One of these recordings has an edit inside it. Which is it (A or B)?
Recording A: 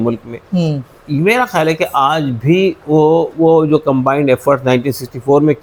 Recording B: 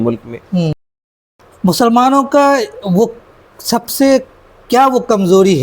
B